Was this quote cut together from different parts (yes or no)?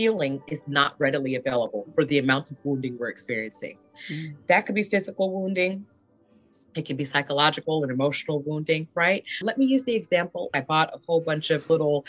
yes